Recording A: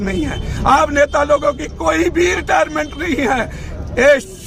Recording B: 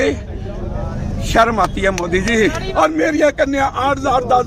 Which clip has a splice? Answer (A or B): B